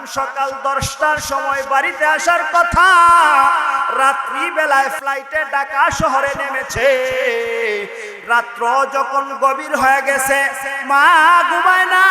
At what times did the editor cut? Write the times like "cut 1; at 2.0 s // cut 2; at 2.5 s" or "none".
cut 1; at 5.0 s